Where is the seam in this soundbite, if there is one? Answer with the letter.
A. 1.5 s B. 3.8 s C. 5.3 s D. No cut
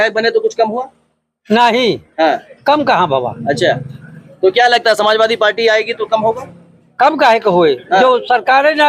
D